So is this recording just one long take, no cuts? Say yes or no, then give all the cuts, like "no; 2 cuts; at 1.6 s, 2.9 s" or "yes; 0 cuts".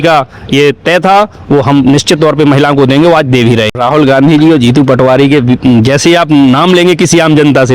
no; 1 cut; at 3.7 s